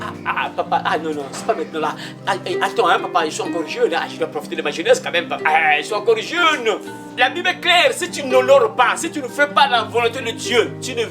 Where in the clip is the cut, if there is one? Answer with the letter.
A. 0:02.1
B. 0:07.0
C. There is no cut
B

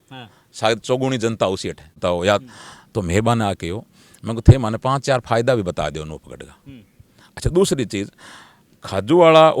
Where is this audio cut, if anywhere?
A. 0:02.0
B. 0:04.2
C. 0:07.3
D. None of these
A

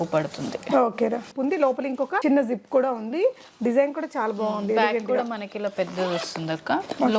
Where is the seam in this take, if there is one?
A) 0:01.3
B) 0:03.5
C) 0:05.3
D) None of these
A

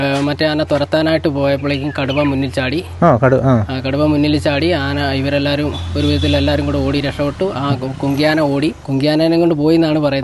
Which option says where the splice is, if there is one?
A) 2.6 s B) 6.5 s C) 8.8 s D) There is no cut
C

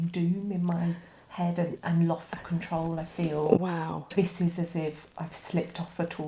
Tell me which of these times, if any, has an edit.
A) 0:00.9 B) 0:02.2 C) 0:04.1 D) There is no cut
C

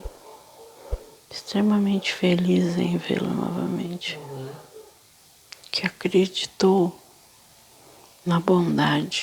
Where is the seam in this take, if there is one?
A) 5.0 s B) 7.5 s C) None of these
A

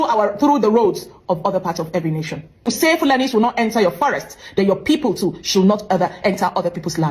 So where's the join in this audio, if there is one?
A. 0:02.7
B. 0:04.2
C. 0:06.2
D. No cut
A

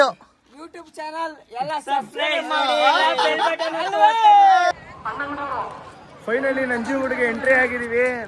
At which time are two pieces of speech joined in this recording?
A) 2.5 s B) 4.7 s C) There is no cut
B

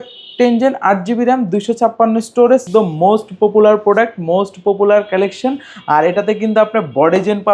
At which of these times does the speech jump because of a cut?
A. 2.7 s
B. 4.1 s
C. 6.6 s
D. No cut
A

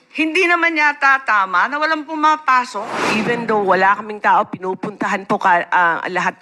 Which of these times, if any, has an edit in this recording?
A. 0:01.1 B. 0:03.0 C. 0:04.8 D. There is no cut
B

